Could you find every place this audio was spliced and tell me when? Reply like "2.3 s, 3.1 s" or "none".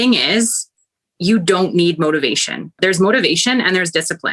2.8 s